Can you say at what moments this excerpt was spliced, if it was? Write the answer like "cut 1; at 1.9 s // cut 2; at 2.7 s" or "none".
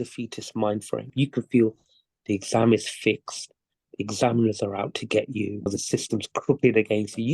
cut 1; at 1.1 s // cut 2; at 5.7 s